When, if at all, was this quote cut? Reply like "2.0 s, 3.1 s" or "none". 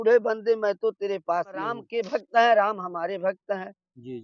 1.8 s